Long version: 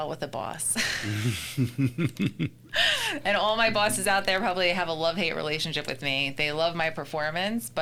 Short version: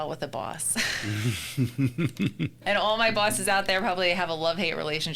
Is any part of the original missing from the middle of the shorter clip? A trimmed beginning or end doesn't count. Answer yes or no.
yes